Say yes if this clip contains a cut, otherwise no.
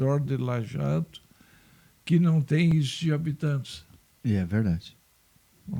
no